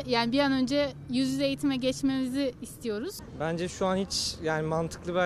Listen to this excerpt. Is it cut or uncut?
cut